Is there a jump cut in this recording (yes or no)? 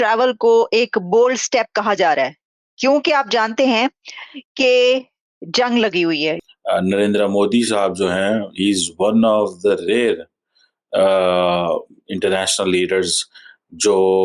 yes